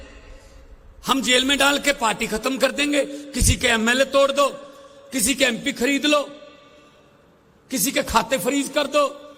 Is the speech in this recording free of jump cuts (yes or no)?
yes